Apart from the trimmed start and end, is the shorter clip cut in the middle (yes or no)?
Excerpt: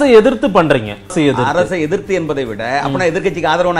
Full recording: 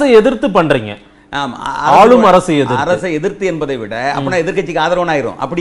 yes